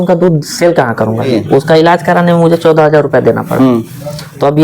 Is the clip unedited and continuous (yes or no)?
no